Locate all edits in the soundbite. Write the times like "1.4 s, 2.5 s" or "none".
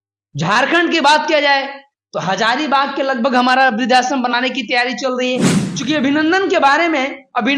5.6 s